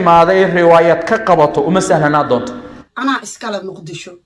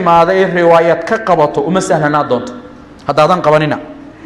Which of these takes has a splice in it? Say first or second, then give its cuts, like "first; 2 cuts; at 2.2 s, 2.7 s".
first; 1 cut; at 2.8 s